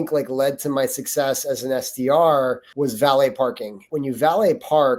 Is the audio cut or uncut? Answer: cut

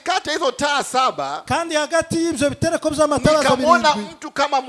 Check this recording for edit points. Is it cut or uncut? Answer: uncut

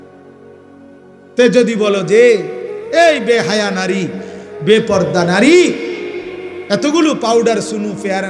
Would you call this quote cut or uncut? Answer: cut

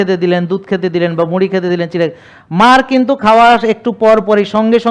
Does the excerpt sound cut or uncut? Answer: uncut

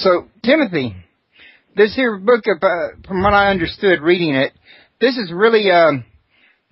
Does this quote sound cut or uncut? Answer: uncut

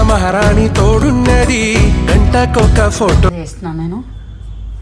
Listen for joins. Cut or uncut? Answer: cut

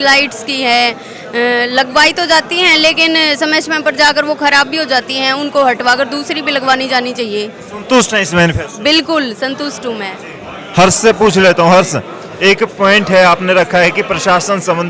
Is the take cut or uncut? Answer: uncut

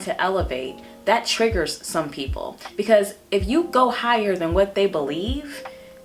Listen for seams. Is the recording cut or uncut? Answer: uncut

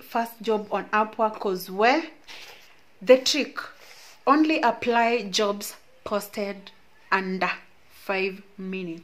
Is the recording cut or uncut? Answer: uncut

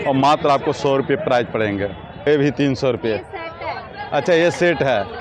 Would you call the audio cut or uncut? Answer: cut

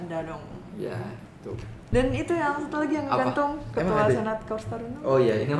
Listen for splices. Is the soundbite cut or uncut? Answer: cut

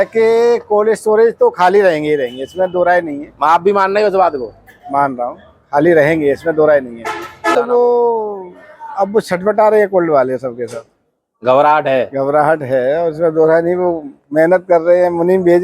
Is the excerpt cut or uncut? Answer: cut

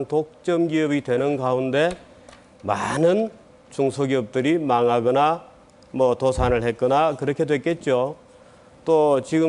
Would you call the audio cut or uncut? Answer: cut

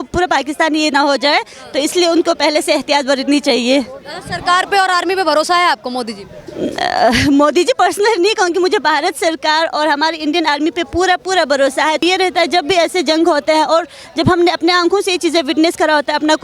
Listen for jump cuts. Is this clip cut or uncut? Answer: cut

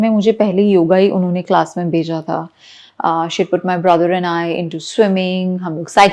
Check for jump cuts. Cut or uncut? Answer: uncut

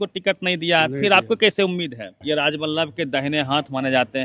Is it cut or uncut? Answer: cut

